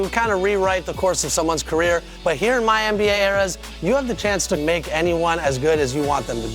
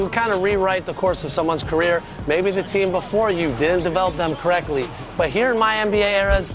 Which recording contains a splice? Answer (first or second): first